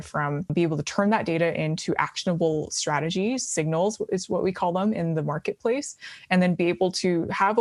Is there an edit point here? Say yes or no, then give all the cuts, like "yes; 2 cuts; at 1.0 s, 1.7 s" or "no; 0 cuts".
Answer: no; 0 cuts